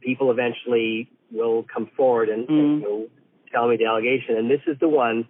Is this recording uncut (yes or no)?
yes